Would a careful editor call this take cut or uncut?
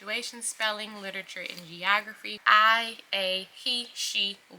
cut